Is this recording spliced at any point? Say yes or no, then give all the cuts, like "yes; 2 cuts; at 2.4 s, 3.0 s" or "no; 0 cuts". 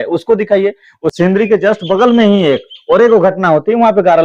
yes; 1 cut; at 1.0 s